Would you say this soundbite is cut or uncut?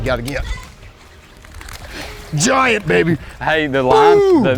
uncut